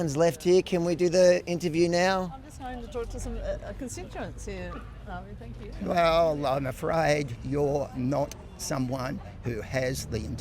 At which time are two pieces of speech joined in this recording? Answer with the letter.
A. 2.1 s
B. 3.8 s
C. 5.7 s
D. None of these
C